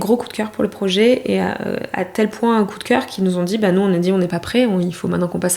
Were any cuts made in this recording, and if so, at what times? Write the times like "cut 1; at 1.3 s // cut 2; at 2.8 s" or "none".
none